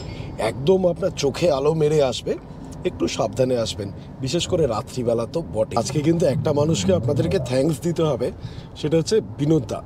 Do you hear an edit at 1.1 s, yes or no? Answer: no